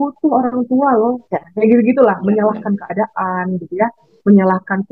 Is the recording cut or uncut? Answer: uncut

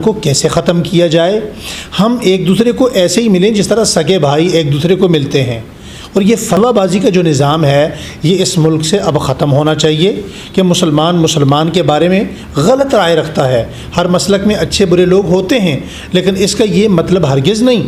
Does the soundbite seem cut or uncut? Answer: uncut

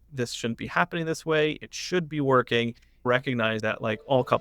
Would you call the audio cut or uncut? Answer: cut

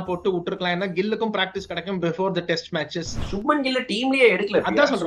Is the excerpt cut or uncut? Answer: cut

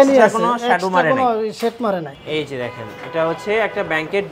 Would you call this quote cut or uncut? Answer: cut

